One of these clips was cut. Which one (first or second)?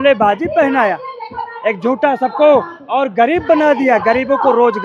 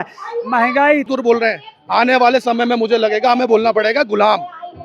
second